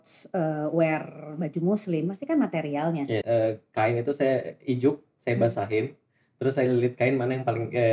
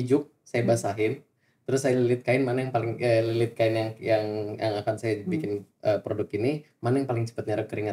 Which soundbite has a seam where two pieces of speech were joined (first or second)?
first